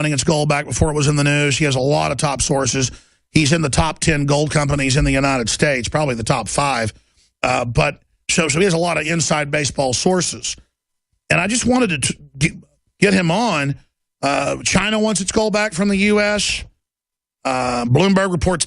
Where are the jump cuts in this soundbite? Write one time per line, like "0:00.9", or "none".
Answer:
0:02.4